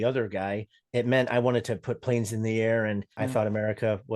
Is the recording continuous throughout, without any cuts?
no; 1 cut; at 3.1 s

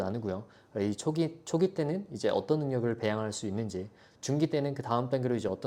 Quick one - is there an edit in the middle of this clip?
no; 0 cuts

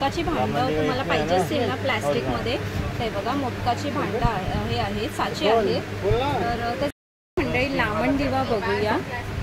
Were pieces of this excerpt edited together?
no; 0 cuts

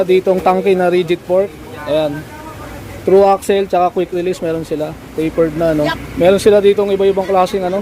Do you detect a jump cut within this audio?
yes; 1 cut; at 6.0 s

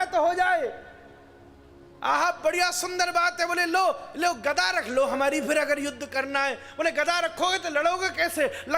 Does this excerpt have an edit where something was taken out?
no; 0 cuts

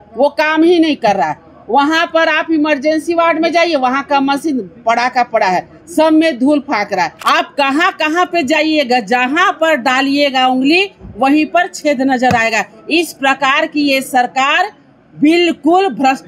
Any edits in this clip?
yes; 1 cut; at 7.2 s

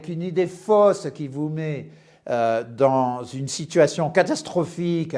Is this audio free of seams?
yes; 0 cuts

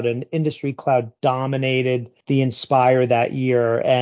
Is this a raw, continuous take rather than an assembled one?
no; 1 cut; at 2.1 s

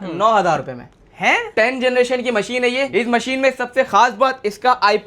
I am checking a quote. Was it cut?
yes; 2 cuts; at 1.5 s, 2.9 s

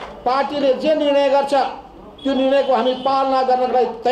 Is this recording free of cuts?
yes; 0 cuts

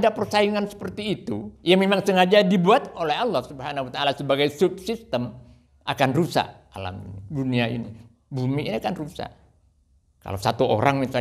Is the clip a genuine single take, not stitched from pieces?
no; 1 cut; at 1.5 s

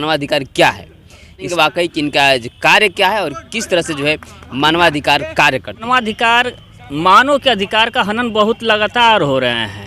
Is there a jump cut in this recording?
yes; 2 cuts; at 1.5 s, 5.8 s

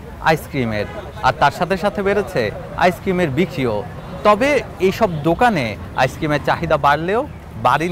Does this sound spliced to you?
no; 0 cuts

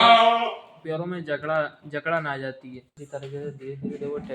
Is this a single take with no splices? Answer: no; 1 cut; at 3.0 s

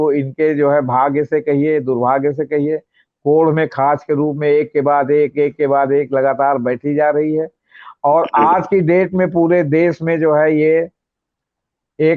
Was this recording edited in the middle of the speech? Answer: no; 0 cuts

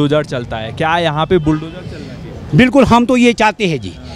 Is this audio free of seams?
yes; 0 cuts

